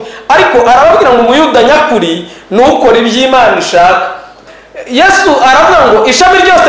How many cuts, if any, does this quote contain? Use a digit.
1